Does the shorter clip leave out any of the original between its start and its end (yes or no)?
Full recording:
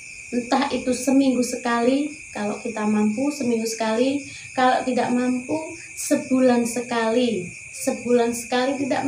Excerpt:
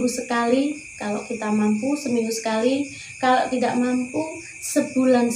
no